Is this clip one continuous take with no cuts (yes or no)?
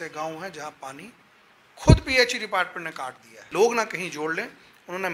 no